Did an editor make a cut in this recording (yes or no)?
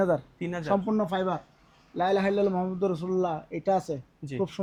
no